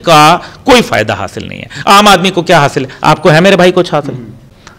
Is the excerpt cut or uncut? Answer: uncut